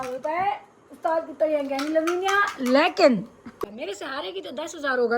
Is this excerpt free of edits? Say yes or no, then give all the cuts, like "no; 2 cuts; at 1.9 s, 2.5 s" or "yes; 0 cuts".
no; 1 cut; at 3.6 s